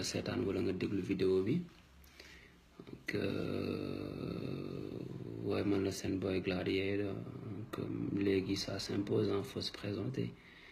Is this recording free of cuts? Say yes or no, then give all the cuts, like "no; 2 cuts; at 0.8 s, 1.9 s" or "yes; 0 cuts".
yes; 0 cuts